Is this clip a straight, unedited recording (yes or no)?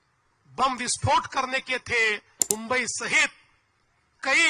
no